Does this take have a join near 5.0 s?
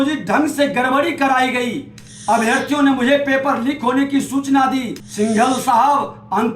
yes; 1 cut; at 5.0 s

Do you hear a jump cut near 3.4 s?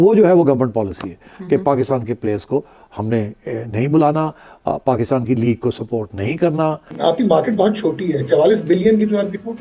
no; 1 cut; at 6.9 s

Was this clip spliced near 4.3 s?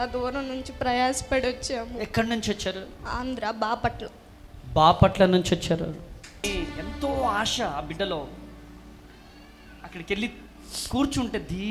no; 1 cut; at 6.4 s

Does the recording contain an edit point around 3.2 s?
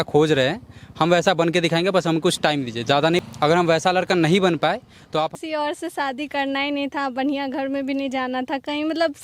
yes; 2 cuts; at 3.2 s, 5.3 s

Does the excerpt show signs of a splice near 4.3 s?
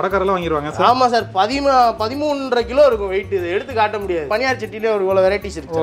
yes; 1 cut; at 4.3 s

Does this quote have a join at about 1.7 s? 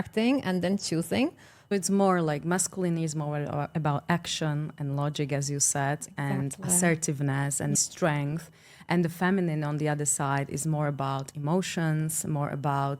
yes; 1 cut; at 1.7 s

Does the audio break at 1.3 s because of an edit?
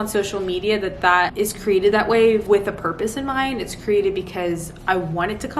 yes; 2 cuts; at 1.3 s, 2.4 s

